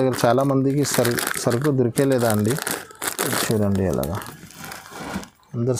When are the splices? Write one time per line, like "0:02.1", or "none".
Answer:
none